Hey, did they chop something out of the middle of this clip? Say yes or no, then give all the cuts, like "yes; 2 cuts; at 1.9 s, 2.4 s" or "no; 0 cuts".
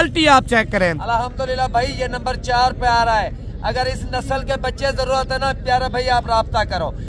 yes; 1 cut; at 1.0 s